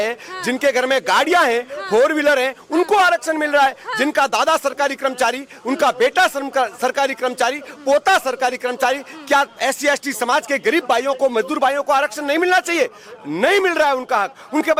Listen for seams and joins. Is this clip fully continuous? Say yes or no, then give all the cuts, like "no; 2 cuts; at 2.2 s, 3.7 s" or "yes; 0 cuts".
yes; 0 cuts